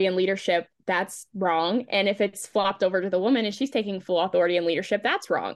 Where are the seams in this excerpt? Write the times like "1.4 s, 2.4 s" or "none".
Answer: none